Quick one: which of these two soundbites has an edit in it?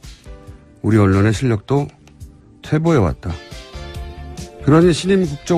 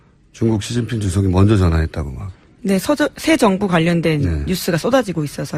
first; 1 cut; at 4.6 s

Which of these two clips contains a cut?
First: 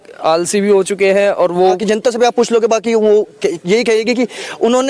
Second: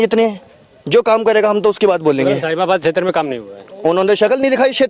first; 1 cut; at 1.8 s

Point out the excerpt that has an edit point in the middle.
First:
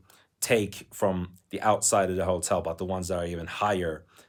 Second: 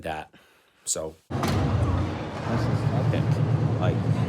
second; 1 cut; at 1.3 s

